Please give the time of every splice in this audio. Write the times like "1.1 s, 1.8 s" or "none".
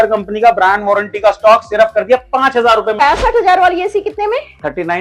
3.0 s